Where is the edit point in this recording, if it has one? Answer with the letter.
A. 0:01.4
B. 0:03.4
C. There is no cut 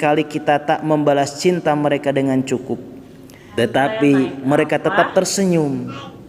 B